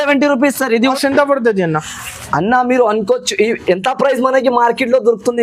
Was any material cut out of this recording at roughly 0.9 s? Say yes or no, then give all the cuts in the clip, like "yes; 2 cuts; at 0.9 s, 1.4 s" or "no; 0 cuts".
yes; 1 cut; at 0.9 s